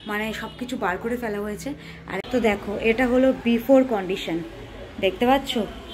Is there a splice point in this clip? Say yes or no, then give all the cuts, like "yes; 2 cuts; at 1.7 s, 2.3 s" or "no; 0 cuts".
yes; 1 cut; at 2.2 s